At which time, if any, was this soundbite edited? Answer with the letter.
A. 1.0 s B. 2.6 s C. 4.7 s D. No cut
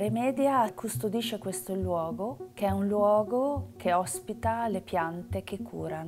D